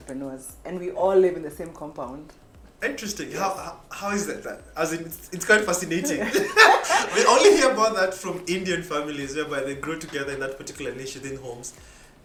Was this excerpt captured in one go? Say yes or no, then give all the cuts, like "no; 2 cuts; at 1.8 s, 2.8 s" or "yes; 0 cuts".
yes; 0 cuts